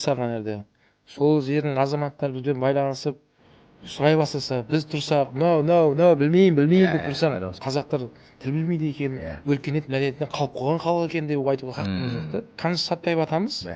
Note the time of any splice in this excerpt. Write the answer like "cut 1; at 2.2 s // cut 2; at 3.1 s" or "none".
cut 1; at 7.5 s // cut 2; at 12.5 s

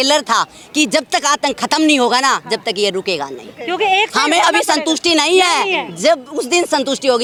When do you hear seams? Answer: none

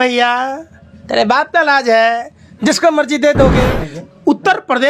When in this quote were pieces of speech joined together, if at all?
cut 1; at 3.6 s

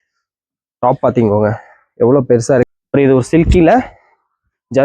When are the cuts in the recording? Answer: cut 1; at 2.7 s

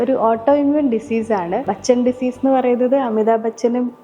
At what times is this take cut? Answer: cut 1; at 1.7 s

